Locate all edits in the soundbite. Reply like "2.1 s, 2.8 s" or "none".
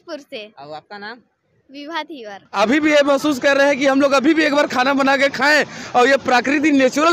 2.4 s